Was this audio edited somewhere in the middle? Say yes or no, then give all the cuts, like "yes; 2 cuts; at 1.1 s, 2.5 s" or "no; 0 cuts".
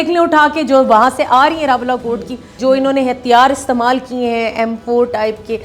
yes; 1 cut; at 2.4 s